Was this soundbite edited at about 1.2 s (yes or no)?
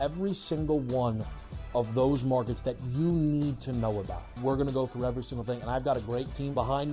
no